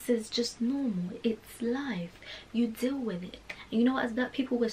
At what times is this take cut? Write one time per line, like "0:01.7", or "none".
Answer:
none